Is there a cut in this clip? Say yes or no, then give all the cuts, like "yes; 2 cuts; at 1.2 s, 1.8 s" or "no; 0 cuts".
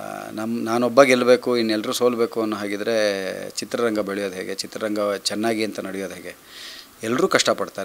no; 0 cuts